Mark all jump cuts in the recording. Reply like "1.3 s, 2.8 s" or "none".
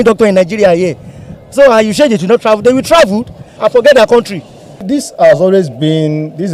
3.5 s, 4.8 s